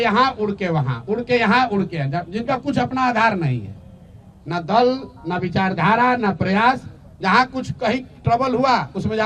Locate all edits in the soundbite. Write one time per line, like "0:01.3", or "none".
none

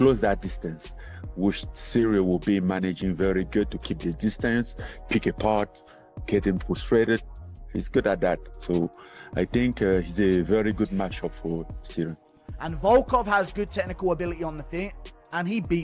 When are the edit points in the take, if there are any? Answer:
0:09.5
0:12.4

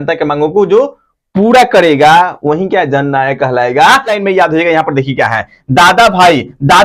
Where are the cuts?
0:04.2

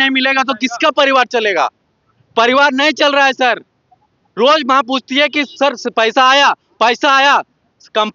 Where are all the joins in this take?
none

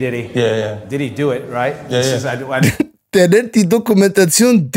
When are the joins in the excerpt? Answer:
none

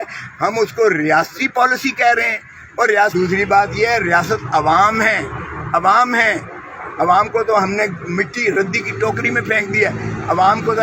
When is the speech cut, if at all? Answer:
0:03.1

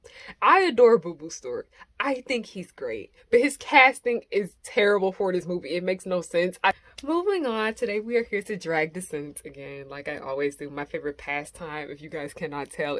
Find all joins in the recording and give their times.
0:06.8

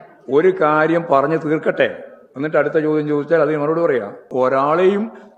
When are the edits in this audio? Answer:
0:04.3

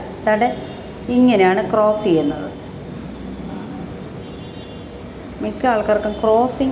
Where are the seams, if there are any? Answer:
none

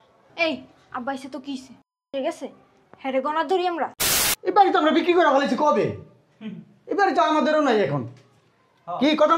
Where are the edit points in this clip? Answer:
0:04.0

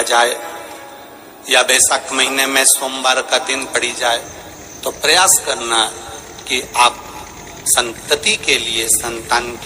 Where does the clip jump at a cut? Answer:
none

